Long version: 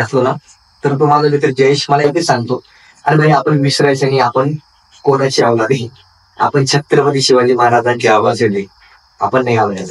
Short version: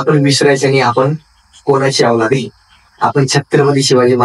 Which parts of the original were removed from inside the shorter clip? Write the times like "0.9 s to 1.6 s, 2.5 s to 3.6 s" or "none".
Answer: none